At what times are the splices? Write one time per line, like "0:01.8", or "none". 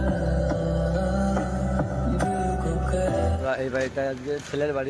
0:03.4